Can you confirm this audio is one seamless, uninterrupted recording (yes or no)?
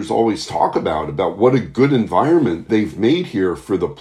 no